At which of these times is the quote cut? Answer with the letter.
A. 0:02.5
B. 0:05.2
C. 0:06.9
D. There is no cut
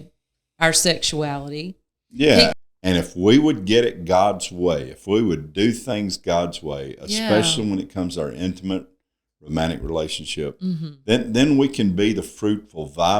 A